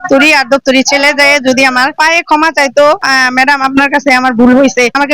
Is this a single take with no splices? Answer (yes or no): no